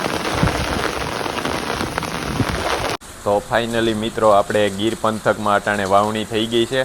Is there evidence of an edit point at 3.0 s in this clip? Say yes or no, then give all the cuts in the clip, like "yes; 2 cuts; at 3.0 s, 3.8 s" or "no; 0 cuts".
yes; 1 cut; at 3.0 s